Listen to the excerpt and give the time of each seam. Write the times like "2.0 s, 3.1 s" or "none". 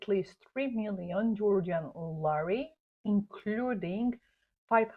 none

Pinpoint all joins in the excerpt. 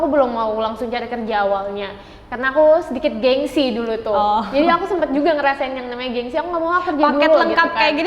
none

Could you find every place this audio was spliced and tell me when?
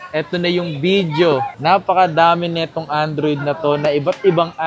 none

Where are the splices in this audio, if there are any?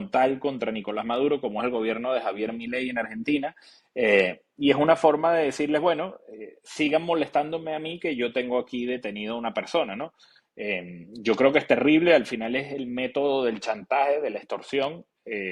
none

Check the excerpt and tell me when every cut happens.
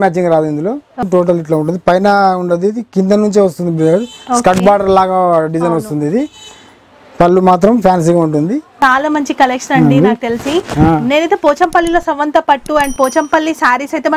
1.1 s, 8.7 s

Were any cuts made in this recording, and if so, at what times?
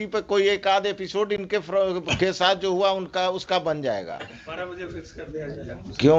4.4 s

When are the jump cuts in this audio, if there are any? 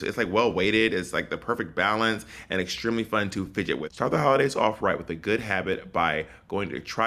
3.9 s

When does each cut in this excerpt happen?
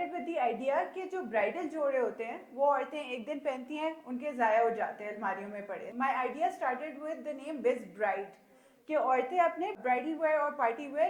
5.9 s, 9.8 s

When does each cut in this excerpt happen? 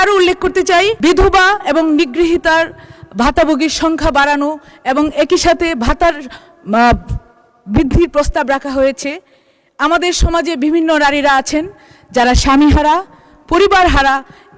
1.0 s

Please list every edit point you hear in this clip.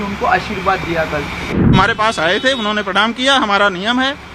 1.7 s

